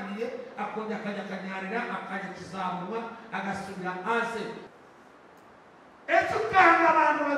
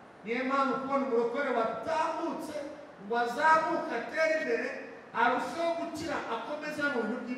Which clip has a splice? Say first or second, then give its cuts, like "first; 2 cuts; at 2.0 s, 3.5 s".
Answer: first; 1 cut; at 4.6 s